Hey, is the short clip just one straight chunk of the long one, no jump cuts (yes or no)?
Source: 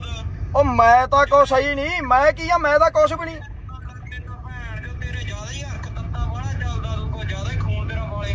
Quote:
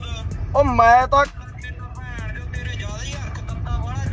no